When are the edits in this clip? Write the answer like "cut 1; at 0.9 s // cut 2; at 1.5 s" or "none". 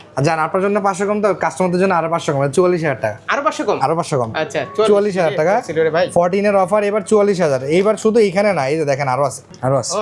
none